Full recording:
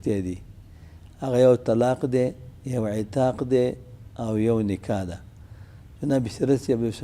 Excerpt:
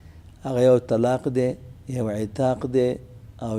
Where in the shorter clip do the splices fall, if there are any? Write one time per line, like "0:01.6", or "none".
none